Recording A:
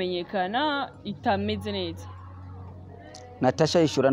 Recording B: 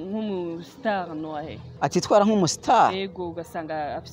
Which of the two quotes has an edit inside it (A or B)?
B